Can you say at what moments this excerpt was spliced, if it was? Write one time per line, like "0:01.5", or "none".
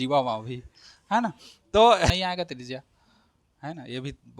0:02.1